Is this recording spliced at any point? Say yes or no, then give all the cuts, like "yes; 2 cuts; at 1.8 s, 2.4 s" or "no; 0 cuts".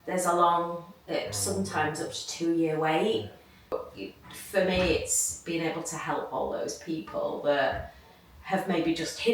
yes; 1 cut; at 3.7 s